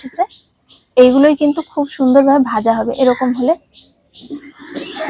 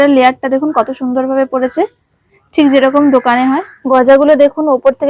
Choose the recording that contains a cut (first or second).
second